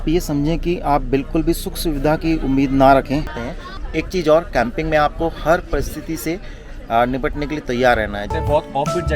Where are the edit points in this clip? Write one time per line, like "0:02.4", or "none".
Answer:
0:03.3
0:08.3